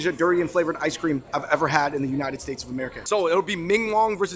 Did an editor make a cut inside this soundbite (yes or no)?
yes